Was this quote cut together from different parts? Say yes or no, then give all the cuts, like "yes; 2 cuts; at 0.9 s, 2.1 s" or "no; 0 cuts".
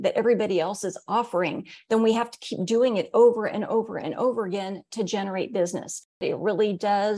yes; 1 cut; at 6.2 s